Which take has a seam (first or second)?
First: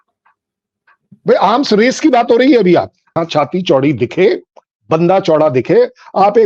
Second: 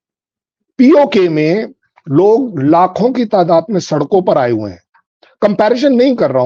first